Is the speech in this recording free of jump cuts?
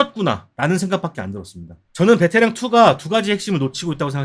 no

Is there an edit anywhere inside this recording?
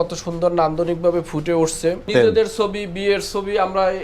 yes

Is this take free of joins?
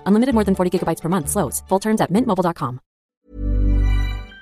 no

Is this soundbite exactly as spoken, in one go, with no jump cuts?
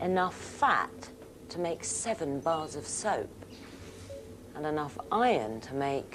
yes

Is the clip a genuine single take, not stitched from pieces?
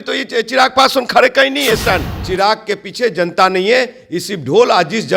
no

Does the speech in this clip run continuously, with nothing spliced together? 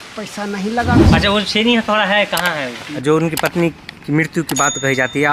no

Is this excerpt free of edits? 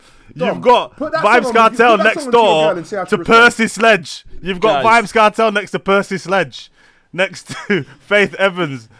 yes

